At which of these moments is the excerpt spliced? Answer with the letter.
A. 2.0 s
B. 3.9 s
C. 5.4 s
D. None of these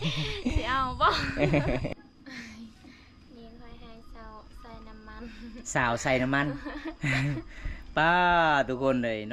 A